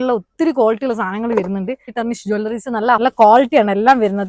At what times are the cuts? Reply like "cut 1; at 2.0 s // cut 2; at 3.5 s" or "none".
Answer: cut 1; at 1.9 s // cut 2; at 3.0 s